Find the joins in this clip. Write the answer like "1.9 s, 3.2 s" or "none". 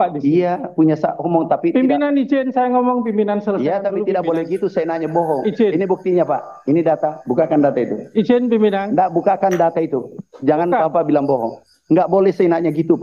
none